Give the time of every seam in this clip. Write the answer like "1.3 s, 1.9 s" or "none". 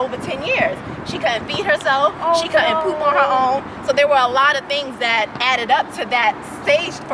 none